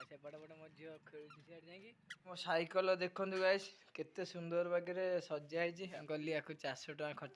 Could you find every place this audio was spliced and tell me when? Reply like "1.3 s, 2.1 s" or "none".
2.3 s, 6.0 s